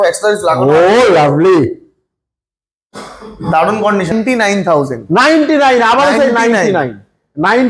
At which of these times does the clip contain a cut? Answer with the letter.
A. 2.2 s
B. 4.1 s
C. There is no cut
B